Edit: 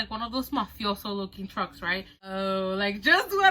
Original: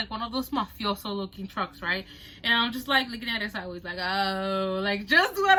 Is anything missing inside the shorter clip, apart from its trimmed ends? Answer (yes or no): yes